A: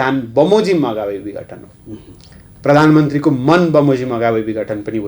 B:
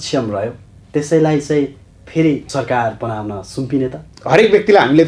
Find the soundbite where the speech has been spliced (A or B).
B